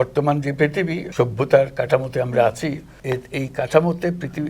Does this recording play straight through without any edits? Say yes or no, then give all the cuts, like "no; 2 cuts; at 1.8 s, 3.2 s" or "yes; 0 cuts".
no; 2 cuts; at 1.1 s, 2.9 s